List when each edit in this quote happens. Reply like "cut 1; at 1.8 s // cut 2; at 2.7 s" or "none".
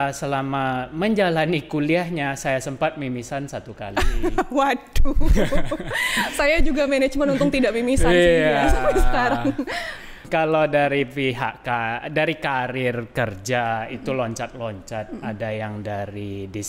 none